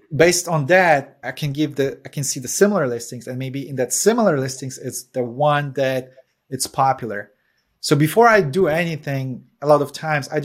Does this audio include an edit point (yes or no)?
yes